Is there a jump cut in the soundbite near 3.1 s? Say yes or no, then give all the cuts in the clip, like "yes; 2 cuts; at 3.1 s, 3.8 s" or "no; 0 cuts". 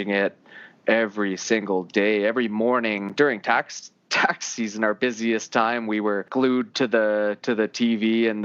yes; 2 cuts; at 3.1 s, 6.2 s